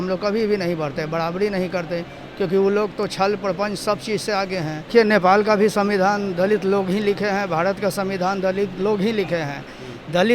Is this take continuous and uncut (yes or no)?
no